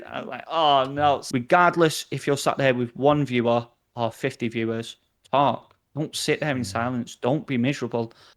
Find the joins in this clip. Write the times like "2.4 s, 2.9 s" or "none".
1.2 s